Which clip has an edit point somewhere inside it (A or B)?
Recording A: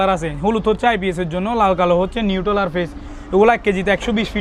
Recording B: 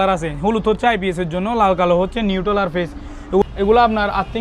B